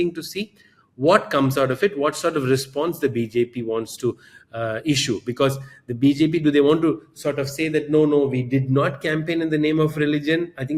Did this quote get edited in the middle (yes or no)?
no